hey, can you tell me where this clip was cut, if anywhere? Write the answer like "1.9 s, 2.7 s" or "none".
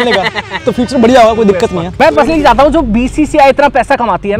1.8 s